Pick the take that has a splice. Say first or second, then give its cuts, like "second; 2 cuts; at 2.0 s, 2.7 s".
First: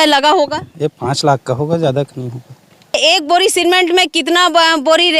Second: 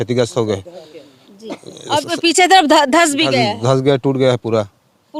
first; 1 cut; at 3.0 s